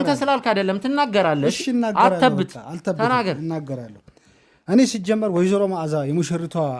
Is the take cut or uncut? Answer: uncut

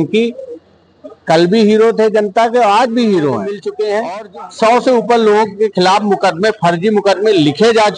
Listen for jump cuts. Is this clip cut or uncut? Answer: cut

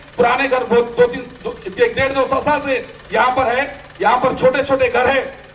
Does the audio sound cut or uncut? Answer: uncut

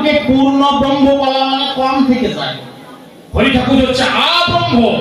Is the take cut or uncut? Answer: uncut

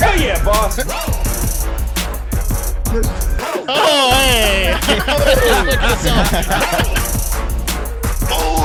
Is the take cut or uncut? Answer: uncut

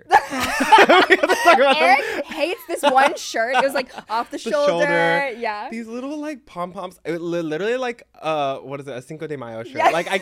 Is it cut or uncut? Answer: uncut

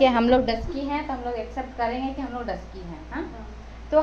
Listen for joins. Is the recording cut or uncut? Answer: uncut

